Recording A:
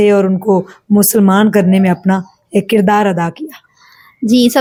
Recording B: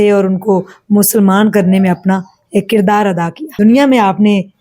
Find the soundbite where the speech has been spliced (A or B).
B